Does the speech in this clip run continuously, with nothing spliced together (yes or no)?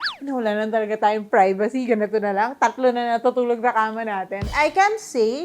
no